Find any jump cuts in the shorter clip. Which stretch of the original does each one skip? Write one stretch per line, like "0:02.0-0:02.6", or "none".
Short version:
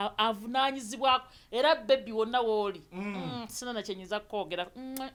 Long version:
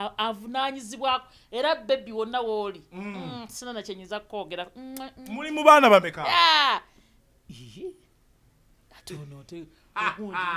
none